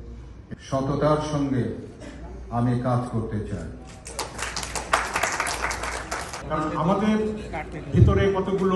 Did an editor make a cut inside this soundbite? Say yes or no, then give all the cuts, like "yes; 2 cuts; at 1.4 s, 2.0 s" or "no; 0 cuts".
yes; 1 cut; at 6.4 s